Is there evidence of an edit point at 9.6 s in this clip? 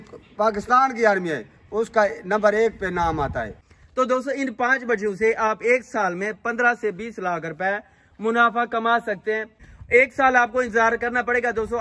yes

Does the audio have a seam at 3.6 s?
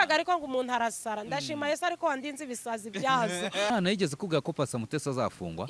yes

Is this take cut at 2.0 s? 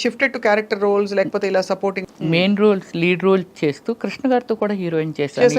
yes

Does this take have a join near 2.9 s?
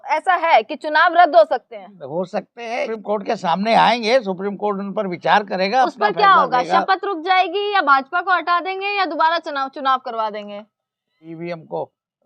yes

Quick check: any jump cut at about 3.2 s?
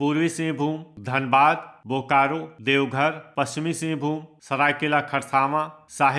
yes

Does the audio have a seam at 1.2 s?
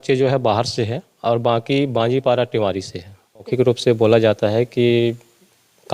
no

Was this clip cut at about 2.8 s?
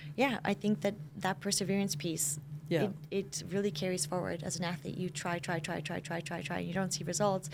no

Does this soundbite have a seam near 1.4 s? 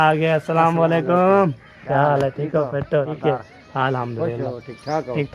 no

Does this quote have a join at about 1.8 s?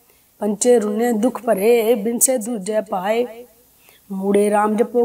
no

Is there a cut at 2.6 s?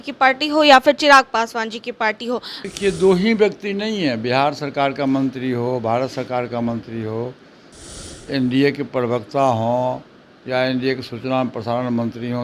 yes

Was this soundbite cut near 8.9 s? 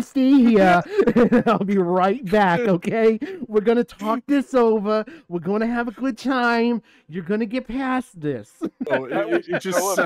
yes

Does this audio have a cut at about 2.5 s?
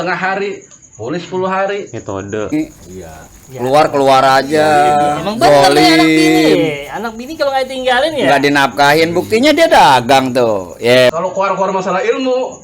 yes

